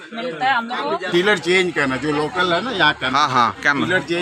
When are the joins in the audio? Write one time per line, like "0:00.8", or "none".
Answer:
0:01.0